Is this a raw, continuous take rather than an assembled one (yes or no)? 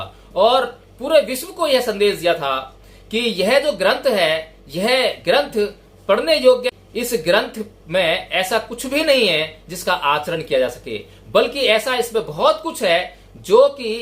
no